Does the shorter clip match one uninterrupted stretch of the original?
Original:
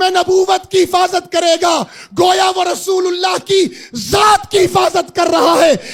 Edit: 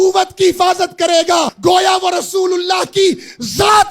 no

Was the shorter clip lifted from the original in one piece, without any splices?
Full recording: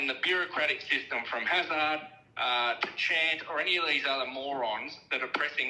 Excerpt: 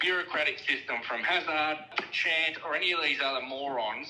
no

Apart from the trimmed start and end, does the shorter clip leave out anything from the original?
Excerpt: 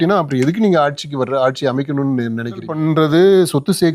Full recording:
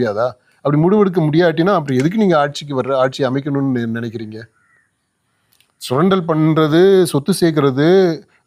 yes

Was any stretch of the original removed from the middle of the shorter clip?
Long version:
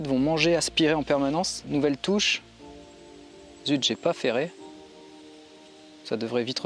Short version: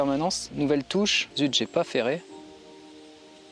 yes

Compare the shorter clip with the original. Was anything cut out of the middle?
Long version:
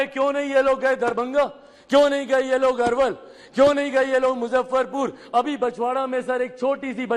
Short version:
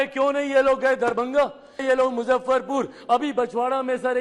yes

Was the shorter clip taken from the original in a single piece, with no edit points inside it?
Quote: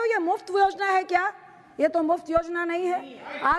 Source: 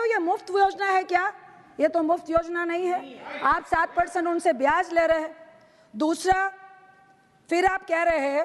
yes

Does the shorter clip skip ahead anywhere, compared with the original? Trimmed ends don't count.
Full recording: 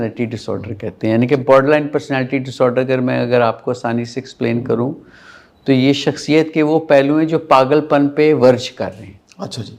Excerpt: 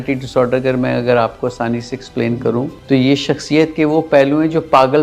yes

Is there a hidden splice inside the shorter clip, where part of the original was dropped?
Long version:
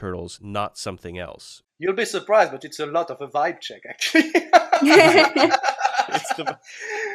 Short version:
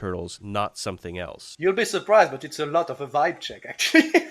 yes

